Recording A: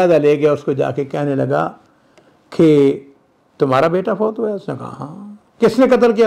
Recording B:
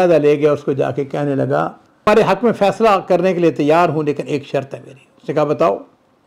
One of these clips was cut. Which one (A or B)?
B